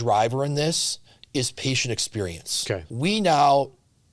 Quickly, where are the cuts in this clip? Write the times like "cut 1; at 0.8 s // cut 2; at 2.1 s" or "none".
cut 1; at 2.9 s